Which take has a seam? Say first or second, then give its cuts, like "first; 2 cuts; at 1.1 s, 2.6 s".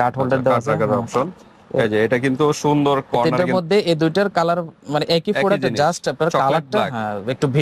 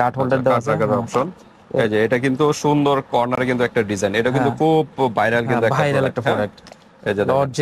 first; 1 cut; at 3.3 s